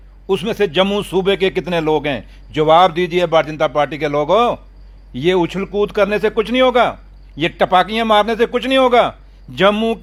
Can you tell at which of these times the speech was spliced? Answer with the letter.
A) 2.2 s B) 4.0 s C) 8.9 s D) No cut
D